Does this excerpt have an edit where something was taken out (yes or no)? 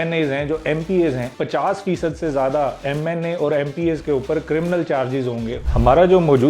yes